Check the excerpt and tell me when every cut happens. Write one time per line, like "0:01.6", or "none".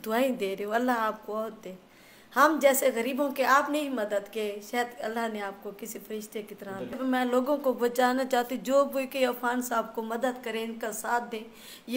0:07.0